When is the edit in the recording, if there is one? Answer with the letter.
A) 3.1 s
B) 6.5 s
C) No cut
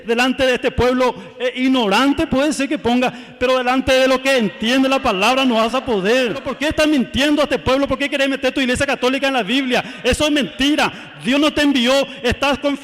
B